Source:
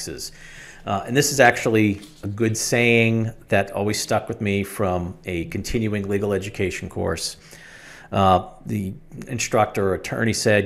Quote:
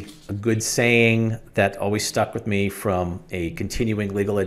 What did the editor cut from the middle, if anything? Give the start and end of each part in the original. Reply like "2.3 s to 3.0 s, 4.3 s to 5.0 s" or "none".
none